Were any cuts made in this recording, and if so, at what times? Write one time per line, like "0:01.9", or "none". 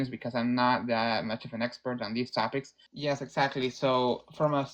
0:02.8